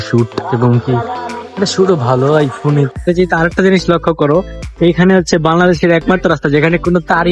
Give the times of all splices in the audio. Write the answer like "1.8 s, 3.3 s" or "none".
2.9 s